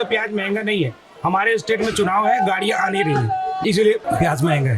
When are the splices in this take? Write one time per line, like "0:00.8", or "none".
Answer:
0:03.6